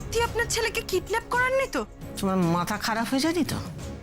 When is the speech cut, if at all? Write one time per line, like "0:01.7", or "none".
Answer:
0:01.9

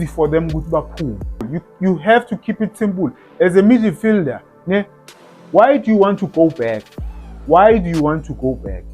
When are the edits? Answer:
0:01.5

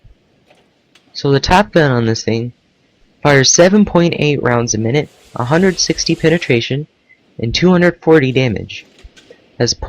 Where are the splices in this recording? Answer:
0:06.3

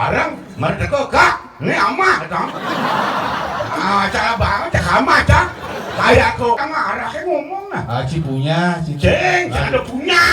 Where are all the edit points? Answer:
0:06.6

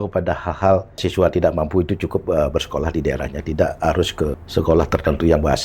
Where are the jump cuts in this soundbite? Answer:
0:01.0
0:04.4

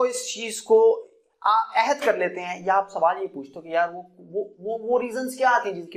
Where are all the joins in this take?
none

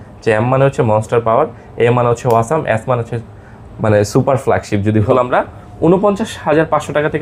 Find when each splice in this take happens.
0:05.1

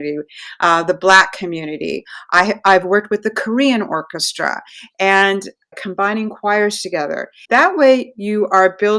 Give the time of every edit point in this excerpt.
0:05.7
0:07.4

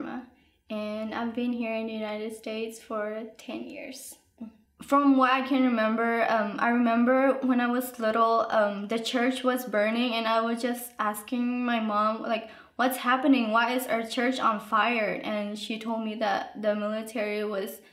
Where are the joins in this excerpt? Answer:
0:04.3

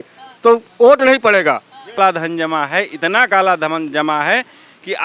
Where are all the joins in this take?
0:02.0

